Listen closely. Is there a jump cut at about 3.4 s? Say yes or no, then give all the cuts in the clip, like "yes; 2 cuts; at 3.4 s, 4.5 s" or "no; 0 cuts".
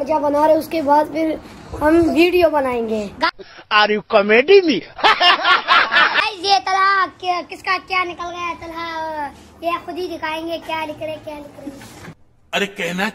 no; 0 cuts